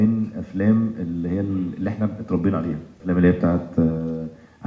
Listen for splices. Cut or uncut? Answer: cut